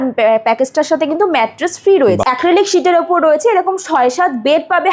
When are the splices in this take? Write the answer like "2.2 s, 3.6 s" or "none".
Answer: 2.2 s